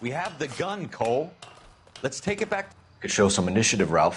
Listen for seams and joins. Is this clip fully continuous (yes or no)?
no